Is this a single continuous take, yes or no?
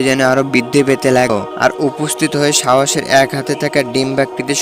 no